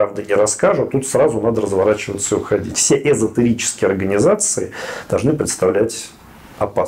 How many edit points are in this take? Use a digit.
0